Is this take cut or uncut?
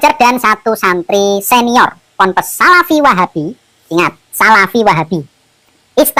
uncut